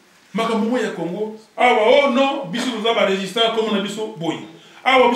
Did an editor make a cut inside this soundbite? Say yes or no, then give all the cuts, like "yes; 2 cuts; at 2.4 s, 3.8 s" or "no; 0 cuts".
no; 0 cuts